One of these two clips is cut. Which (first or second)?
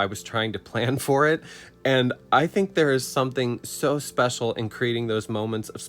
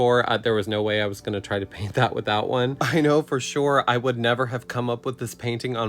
second